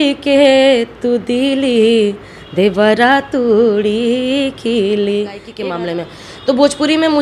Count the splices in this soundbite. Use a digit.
1